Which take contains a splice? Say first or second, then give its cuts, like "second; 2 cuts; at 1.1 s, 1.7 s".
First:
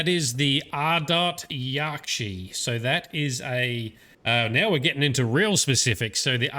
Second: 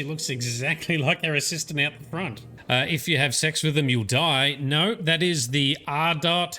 second; 1 cut; at 2.5 s